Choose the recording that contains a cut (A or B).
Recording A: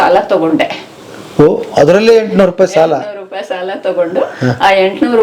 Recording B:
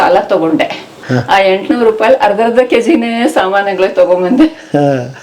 B